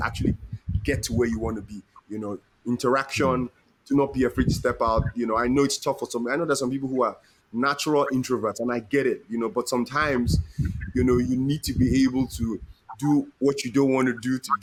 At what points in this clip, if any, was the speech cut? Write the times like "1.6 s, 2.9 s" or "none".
none